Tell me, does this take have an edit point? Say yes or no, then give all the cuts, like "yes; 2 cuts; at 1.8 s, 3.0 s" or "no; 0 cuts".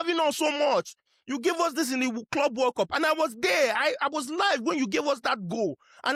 no; 0 cuts